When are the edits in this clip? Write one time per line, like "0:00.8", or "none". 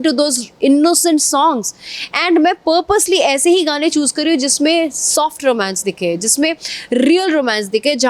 none

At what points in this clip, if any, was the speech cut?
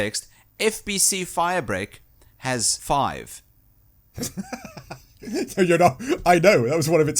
0:02.7

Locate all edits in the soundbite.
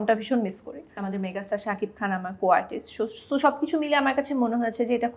0:00.9

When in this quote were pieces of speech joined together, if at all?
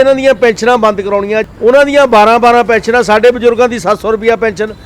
0:01.4

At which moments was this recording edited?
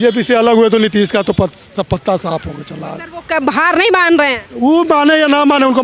none

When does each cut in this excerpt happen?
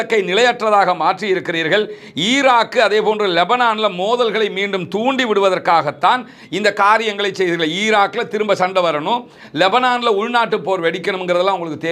none

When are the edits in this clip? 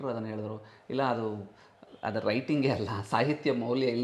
none

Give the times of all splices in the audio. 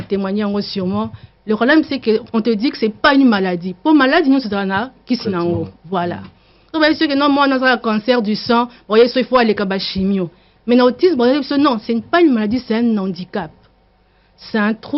none

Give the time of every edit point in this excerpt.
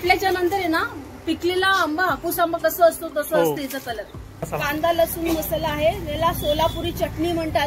0:04.5

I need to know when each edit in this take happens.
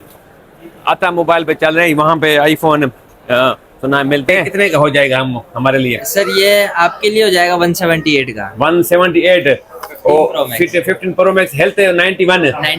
0:04.4

